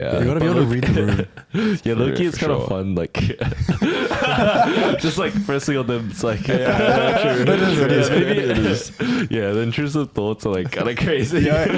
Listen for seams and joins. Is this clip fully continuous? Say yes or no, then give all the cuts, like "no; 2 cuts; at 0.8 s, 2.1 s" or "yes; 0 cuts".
yes; 0 cuts